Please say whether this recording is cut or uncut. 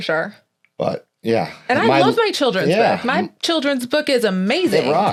uncut